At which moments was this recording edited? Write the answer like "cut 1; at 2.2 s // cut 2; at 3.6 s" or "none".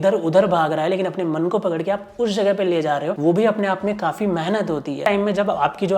cut 1; at 5.0 s